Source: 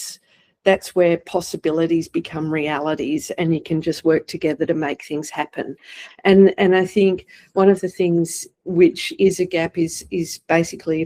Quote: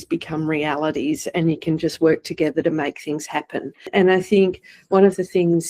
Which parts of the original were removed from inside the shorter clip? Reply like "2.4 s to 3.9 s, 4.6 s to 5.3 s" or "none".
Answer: 5.9 s to 6.6 s